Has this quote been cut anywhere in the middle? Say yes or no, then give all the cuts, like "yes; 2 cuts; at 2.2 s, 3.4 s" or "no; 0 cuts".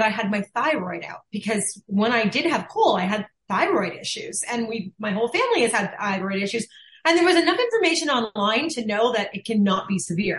no; 0 cuts